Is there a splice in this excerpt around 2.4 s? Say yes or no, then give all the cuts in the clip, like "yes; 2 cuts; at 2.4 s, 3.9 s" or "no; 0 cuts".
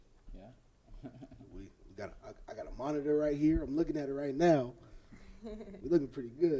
no; 1 cut; at 4.4 s